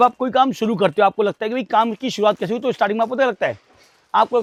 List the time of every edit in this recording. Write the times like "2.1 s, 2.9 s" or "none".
none